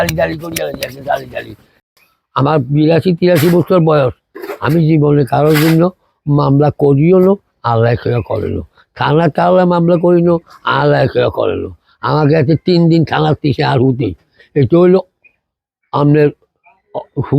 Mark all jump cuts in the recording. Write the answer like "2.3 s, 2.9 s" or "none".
1.9 s